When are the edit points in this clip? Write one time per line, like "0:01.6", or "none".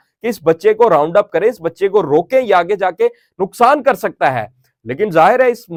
none

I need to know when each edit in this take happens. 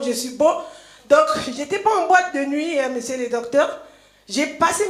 none

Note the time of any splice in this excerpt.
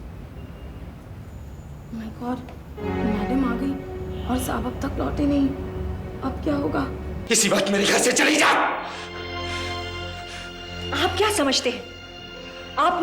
0:07.2

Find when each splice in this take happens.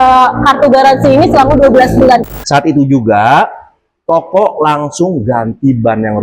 0:02.3

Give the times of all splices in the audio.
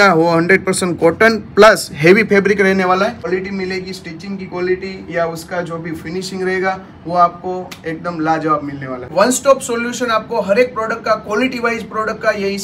0:03.3
0:09.1

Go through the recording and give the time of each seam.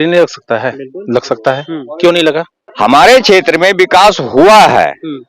0:02.6

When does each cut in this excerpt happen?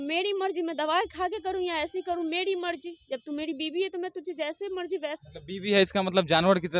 0:05.2

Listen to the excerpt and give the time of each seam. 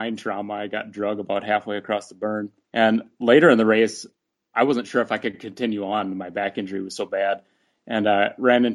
0:02.6

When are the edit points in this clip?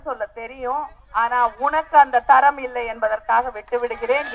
none

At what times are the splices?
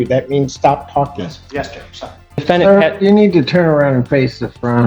0:02.4

